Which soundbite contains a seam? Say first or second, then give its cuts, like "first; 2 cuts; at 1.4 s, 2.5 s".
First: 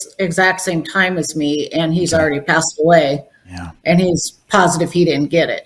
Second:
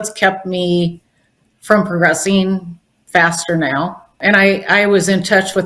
second; 1 cut; at 4.2 s